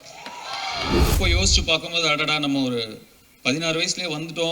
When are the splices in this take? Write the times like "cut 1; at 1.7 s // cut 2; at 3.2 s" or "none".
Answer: cut 1; at 1.1 s